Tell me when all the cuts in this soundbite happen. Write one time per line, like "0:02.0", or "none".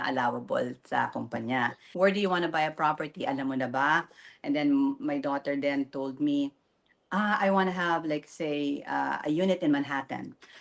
0:01.8